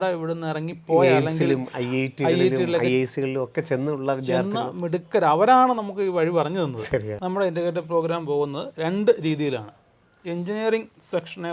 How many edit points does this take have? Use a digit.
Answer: 1